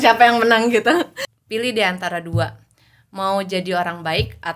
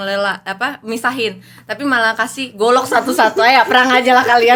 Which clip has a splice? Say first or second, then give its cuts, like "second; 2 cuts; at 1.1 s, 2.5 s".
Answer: first; 1 cut; at 1.2 s